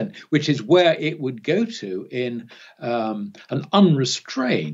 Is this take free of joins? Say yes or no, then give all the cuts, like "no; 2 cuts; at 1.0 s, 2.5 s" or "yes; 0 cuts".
yes; 0 cuts